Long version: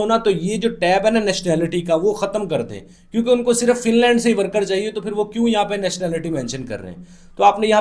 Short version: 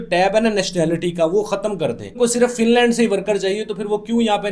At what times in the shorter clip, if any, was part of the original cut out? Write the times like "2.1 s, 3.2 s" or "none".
2.2 s